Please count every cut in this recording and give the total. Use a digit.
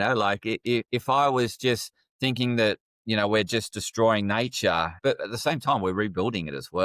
1